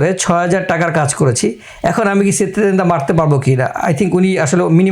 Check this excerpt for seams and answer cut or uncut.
uncut